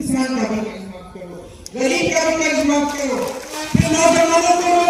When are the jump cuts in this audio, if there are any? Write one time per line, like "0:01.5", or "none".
none

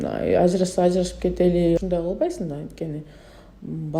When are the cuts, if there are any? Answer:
0:01.8

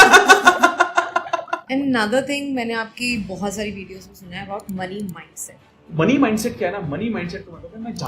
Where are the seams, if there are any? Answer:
0:01.6
0:05.9

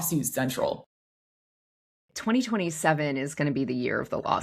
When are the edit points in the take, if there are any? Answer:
0:03.3

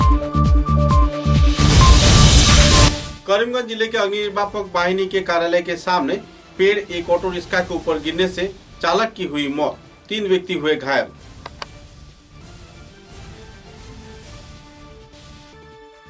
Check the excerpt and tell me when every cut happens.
none

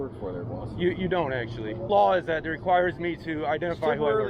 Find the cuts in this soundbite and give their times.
0:01.9

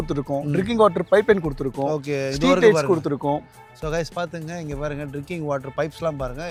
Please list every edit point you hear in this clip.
none

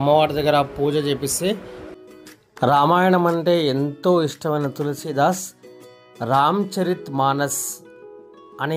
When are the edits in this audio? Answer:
0:01.9

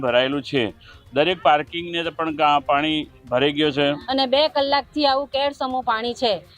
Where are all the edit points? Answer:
0:04.0

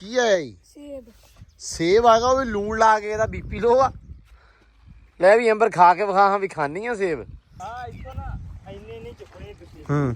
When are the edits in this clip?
0:07.5

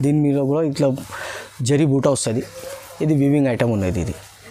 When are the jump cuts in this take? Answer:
none

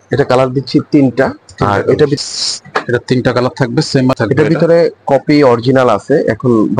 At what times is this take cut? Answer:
0:02.2
0:04.1

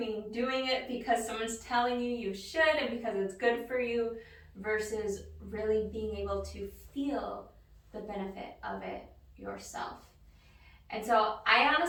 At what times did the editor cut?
none

